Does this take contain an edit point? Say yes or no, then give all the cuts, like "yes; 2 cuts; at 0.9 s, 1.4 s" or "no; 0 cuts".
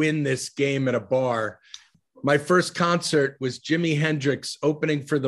yes; 1 cut; at 1.9 s